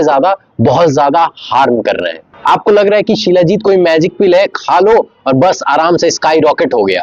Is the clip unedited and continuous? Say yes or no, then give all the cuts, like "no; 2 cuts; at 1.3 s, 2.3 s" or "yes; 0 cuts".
no; 1 cut; at 2.3 s